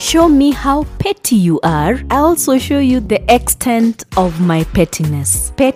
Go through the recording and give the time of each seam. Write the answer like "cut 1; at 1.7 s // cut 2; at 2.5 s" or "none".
none